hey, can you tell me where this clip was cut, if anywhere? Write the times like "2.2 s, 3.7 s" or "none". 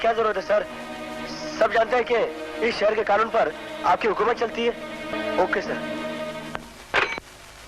5.1 s